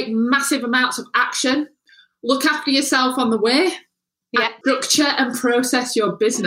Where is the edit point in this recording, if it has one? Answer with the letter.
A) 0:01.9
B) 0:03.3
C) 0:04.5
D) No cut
C